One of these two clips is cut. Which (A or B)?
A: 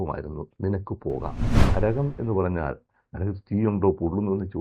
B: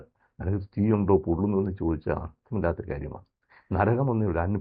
A